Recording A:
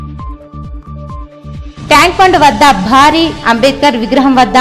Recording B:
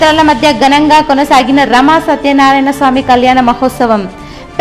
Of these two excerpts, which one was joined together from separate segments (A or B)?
A